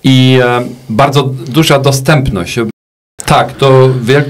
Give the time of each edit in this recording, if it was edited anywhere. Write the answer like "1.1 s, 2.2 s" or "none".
3.0 s